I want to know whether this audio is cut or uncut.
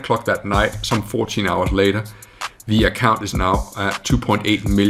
uncut